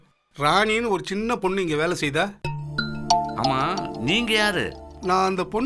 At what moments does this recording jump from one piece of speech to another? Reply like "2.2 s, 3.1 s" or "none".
none